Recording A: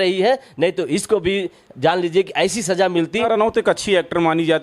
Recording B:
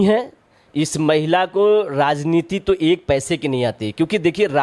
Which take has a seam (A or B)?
A